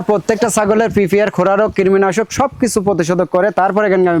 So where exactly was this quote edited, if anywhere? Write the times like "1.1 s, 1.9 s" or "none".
none